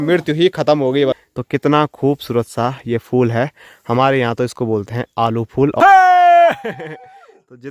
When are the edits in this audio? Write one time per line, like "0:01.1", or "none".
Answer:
0:01.2
0:05.8